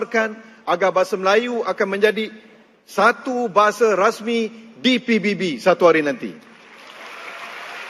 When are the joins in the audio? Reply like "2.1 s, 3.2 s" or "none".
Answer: none

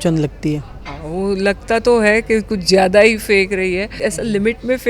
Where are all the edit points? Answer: 4.0 s

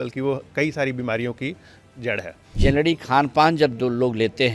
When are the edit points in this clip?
2.4 s

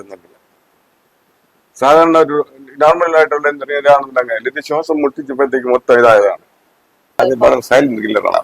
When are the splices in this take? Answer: 7.2 s

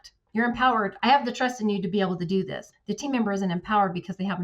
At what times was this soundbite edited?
0.9 s, 2.6 s

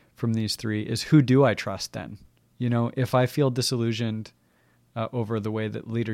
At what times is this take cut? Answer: 2.6 s

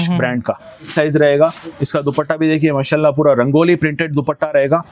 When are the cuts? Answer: 0.9 s

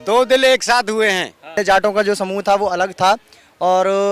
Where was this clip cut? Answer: 1.6 s

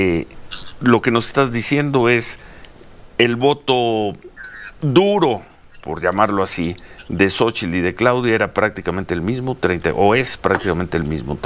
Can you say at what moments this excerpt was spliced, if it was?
none

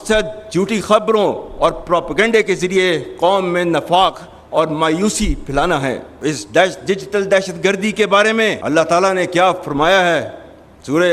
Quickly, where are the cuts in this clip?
6.1 s, 8.6 s

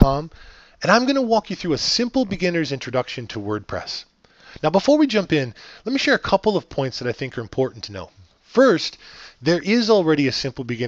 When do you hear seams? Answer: none

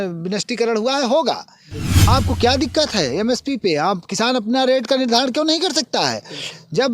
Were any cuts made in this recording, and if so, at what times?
2.1 s

